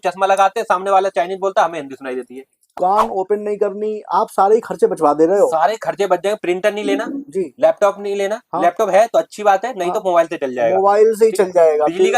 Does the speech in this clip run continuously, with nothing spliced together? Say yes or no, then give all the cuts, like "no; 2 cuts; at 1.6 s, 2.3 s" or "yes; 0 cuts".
no; 1 cut; at 2.8 s